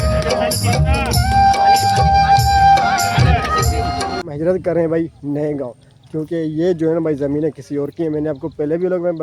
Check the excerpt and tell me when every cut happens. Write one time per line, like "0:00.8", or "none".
0:04.3